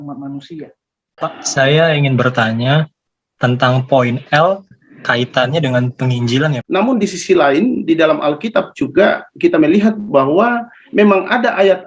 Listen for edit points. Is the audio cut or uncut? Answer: cut